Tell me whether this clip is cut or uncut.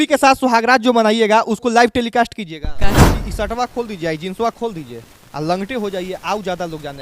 cut